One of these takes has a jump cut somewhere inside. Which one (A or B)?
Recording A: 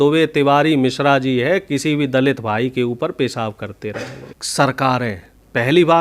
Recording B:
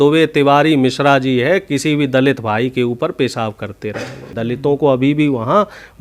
B